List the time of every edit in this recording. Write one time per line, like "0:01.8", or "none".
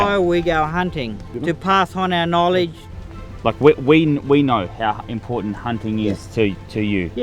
0:01.3
0:03.1